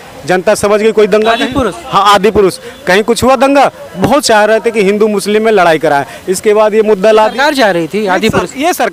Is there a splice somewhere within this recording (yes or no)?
no